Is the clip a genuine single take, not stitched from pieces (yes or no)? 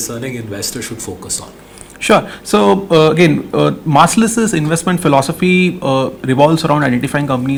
yes